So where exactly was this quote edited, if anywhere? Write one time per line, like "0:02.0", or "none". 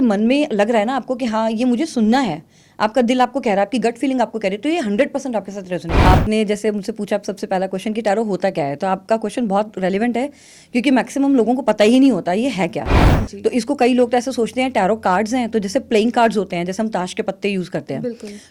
0:06.1